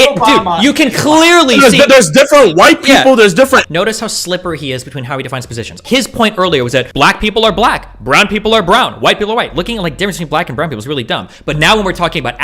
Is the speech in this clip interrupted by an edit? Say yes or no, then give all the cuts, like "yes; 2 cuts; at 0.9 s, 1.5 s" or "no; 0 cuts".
yes; 3 cuts; at 3.7 s, 5.8 s, 6.9 s